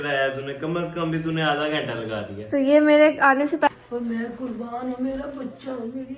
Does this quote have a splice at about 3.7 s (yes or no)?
yes